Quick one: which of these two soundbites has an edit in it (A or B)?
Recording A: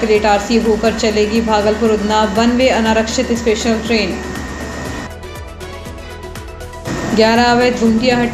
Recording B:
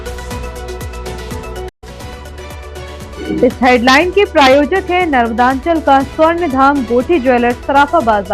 B